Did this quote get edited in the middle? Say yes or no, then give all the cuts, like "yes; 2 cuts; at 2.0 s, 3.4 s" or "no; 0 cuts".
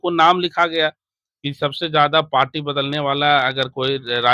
no; 0 cuts